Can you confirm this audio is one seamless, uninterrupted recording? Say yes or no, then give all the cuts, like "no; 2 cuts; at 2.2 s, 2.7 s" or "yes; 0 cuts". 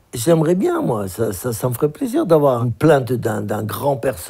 no; 1 cut; at 2.6 s